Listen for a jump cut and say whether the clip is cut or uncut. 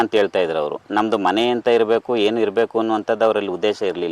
uncut